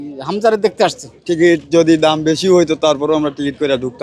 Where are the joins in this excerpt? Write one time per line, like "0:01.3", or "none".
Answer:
0:01.0